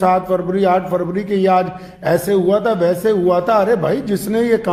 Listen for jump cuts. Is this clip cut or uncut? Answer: uncut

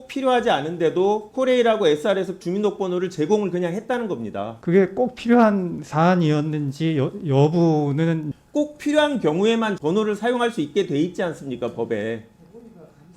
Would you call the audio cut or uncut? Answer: cut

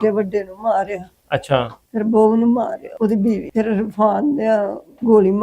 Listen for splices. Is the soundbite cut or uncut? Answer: uncut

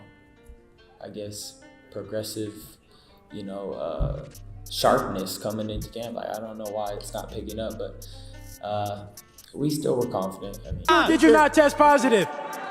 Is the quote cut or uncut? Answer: cut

